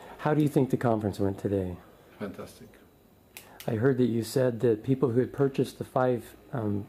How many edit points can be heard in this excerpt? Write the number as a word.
zero